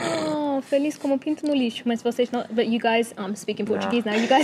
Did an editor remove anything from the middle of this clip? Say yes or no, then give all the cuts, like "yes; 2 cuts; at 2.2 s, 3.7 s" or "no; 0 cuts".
no; 0 cuts